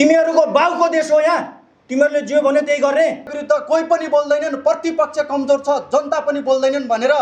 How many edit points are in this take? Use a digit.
1